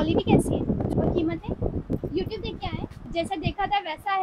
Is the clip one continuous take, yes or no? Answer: no